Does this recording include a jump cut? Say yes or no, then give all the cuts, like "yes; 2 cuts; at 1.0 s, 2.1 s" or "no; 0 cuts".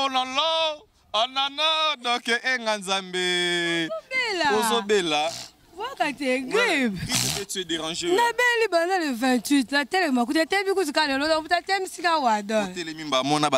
no; 0 cuts